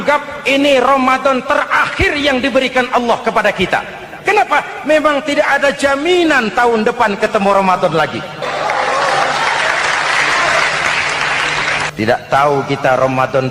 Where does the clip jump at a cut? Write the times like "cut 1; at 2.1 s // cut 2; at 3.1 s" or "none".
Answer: cut 1; at 8.4 s // cut 2; at 11.9 s